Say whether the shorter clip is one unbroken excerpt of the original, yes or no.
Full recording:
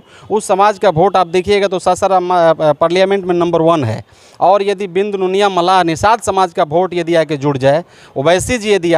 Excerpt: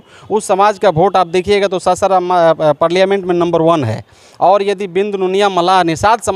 yes